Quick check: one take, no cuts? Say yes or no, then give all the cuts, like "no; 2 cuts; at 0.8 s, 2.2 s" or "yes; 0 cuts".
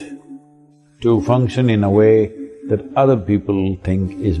yes; 0 cuts